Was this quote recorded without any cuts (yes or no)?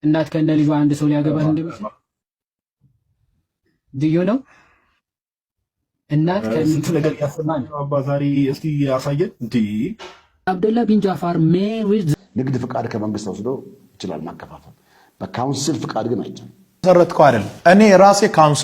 no